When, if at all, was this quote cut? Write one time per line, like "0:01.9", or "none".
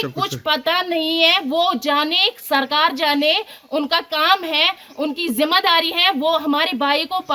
none

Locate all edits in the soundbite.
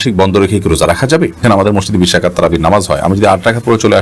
0:01.5

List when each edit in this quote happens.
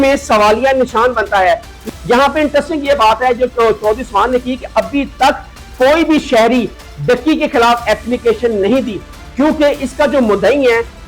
0:01.8

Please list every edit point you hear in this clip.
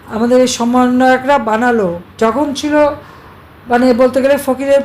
0:02.1

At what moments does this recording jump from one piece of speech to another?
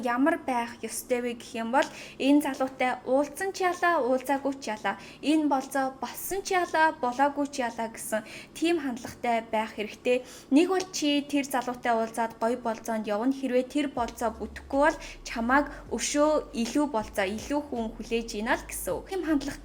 none

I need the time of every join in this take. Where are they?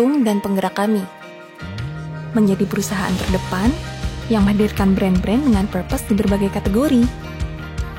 none

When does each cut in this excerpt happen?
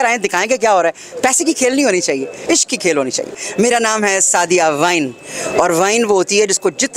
0:03.4

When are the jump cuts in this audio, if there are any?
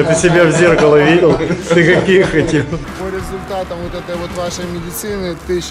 0:02.8

